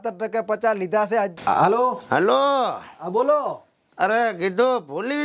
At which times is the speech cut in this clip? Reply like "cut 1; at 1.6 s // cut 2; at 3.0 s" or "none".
cut 1; at 1.3 s